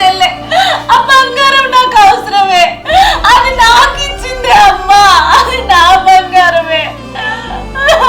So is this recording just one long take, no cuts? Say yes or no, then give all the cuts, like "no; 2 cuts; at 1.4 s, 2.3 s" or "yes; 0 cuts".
yes; 0 cuts